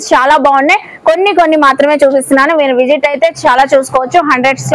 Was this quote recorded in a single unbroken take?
yes; 0 cuts

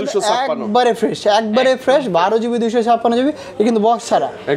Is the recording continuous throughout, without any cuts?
yes; 0 cuts

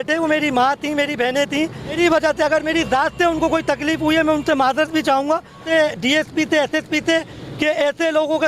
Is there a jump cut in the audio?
yes; 2 cuts; at 1.9 s, 5.6 s

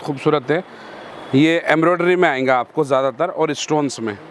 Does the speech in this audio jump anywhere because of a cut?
no; 0 cuts

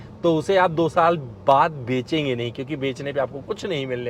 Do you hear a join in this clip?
no; 0 cuts

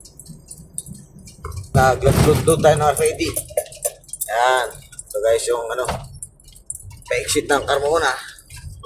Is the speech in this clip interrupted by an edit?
yes; 1 cut; at 1.7 s

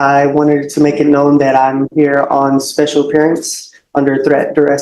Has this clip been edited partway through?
no; 0 cuts

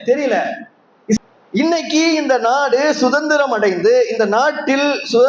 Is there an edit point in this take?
yes; 1 cut; at 1.2 s

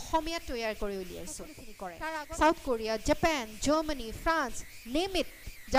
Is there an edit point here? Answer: yes; 1 cut; at 1.8 s

